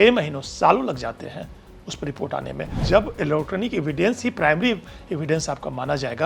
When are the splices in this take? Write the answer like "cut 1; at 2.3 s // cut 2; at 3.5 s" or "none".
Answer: cut 1; at 2.7 s